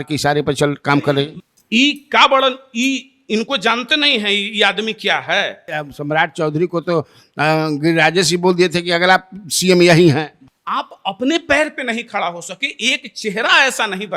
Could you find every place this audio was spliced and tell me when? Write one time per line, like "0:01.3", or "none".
0:01.4
0:05.7
0:10.4